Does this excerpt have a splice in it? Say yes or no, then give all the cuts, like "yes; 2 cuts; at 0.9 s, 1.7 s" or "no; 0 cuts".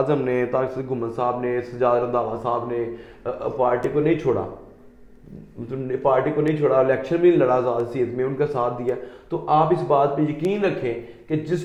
no; 0 cuts